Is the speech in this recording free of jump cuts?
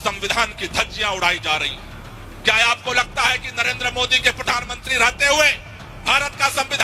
yes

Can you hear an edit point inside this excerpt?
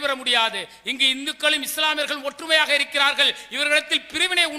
no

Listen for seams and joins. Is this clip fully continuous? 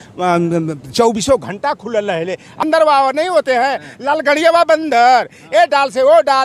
no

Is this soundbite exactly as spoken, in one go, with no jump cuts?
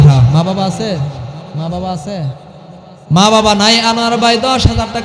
yes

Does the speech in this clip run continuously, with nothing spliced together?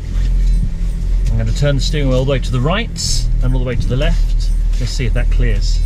yes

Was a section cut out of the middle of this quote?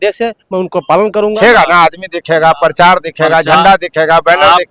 yes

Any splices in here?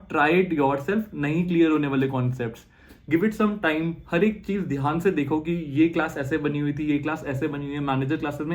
no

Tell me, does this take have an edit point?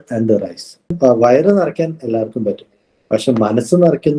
yes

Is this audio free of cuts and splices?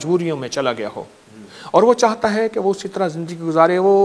yes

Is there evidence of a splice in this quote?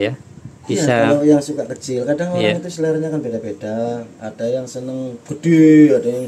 no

